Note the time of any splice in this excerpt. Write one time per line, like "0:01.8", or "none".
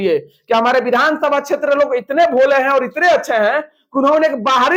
none